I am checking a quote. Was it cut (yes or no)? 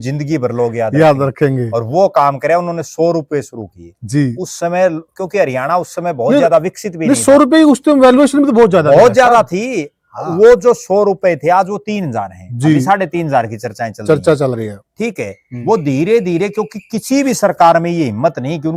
no